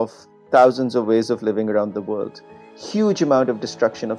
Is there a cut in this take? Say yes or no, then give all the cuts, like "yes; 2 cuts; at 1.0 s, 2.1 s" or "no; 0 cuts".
no; 0 cuts